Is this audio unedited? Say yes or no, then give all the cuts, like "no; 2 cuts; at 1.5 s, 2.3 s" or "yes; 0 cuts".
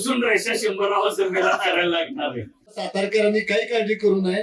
no; 1 cut; at 2.8 s